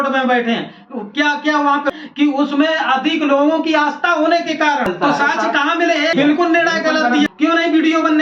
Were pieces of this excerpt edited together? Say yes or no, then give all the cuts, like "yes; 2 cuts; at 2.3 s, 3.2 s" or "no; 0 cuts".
yes; 4 cuts; at 1.9 s, 4.9 s, 6.1 s, 7.3 s